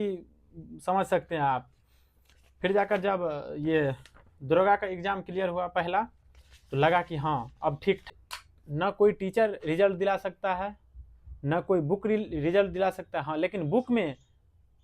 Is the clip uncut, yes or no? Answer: no